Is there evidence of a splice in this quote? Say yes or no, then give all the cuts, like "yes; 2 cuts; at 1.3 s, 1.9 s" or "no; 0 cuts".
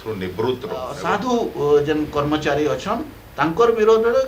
yes; 1 cut; at 0.9 s